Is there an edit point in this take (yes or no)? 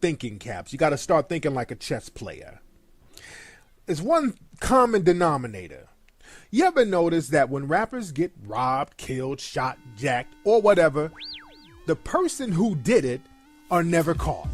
yes